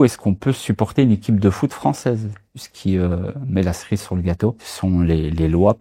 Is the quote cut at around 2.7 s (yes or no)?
yes